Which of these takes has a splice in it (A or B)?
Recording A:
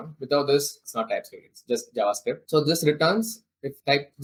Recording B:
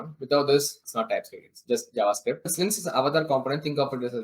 B